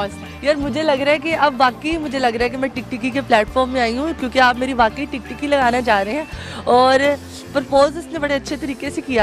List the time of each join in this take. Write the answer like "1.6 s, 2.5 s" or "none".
none

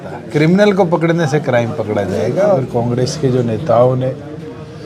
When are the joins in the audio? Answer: 2.6 s

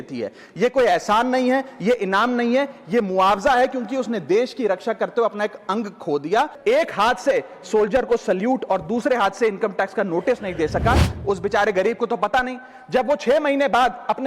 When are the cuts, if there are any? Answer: 6.5 s, 11.1 s

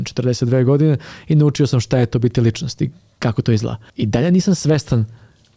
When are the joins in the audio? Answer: 3.8 s

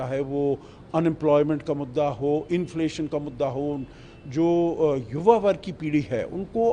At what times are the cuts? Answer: none

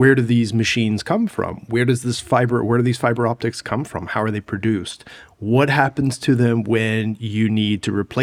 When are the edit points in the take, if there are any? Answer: none

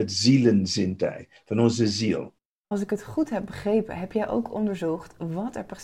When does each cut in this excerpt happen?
2.6 s

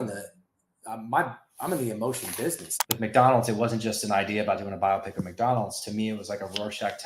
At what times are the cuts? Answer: 2.8 s

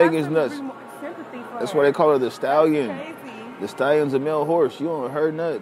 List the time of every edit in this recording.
none

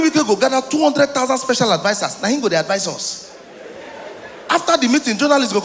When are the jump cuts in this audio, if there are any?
none

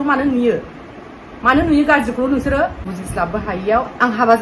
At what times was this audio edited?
2.9 s

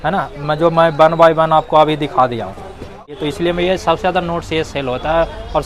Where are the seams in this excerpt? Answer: 3.1 s

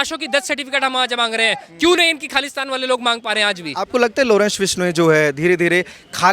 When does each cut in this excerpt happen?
3.9 s

